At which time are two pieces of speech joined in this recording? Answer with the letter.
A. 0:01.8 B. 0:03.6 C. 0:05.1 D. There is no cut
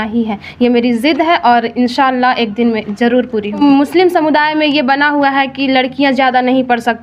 B